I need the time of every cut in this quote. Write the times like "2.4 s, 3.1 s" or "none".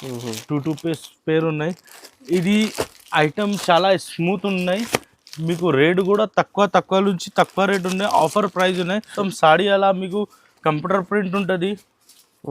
9.1 s